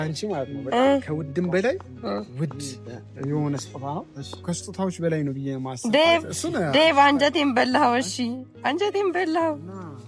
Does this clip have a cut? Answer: yes; 1 cut; at 4.4 s

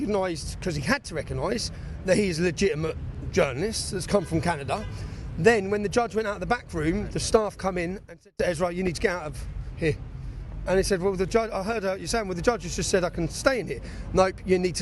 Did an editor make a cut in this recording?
no; 0 cuts

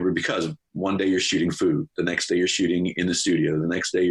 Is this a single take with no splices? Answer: yes; 0 cuts

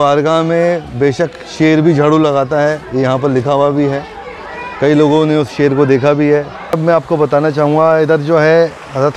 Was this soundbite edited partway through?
yes; 1 cut; at 6.8 s

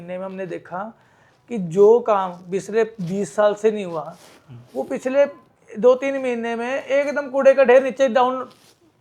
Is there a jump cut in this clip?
no; 0 cuts

